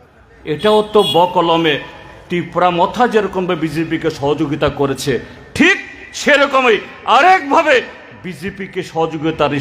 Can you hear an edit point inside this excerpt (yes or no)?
no